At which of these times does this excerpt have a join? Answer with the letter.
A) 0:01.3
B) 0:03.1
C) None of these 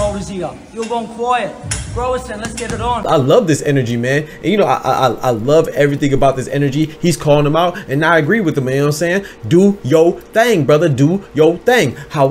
B